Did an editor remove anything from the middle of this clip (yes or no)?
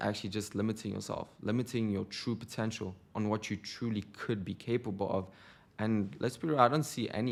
no